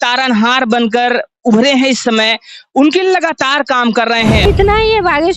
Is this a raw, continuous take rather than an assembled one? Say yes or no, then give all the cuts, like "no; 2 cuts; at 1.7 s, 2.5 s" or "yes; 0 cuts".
no; 1 cut; at 4.5 s